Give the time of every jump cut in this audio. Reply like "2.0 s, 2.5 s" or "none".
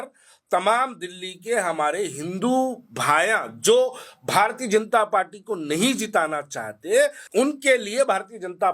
7.2 s